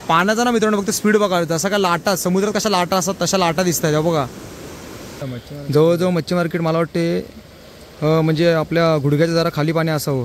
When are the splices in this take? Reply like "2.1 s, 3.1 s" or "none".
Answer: 5.2 s